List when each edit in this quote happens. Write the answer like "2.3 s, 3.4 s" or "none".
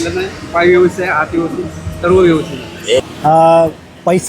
3.0 s